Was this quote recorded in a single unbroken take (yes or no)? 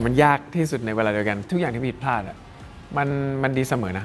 no